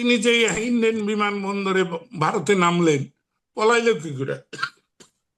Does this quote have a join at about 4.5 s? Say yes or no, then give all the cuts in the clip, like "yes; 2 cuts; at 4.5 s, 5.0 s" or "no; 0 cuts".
no; 0 cuts